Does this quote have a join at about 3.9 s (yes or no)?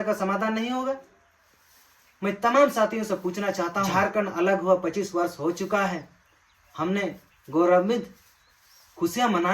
yes